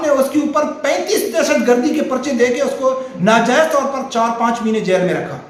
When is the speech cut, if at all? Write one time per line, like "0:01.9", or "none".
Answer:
none

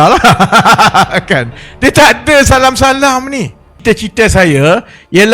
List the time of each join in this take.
0:03.7

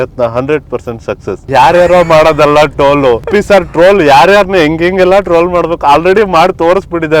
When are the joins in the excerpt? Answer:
0:01.5
0:03.3

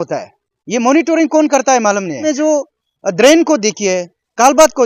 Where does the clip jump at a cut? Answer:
0:02.3

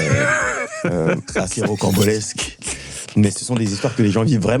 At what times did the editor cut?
none

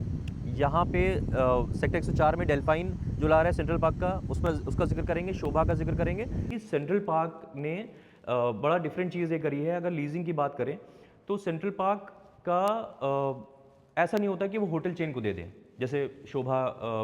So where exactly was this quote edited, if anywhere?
0:06.5

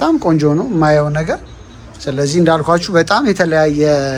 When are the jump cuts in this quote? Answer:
none

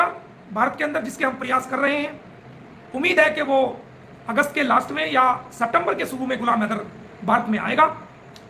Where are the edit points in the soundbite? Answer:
none

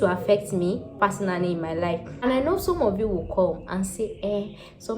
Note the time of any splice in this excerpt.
0:02.0

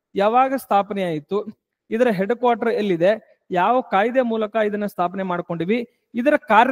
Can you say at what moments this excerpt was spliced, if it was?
none

